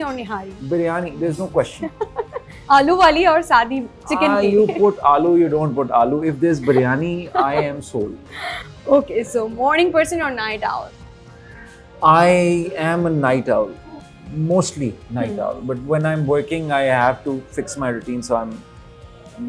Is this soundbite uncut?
yes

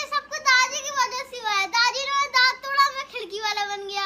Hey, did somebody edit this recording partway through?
no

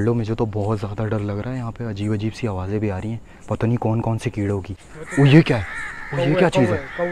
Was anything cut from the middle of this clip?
no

